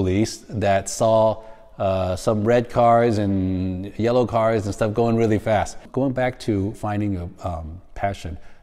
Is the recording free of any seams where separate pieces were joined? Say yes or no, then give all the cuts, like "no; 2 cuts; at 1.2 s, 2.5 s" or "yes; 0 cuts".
no; 1 cut; at 5.8 s